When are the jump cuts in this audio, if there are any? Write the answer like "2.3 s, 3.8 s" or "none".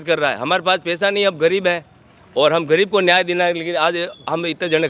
none